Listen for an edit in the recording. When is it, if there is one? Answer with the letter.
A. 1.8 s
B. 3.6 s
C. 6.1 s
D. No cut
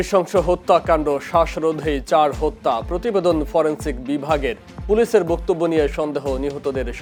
D